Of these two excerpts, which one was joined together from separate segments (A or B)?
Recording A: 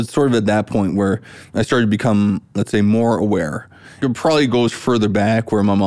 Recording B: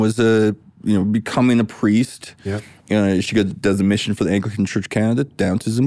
A